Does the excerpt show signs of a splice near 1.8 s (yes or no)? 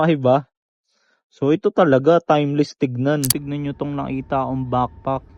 no